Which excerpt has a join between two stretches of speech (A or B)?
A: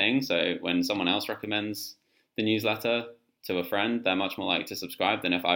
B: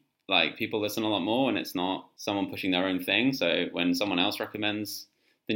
B